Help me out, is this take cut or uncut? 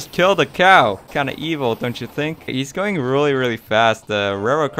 cut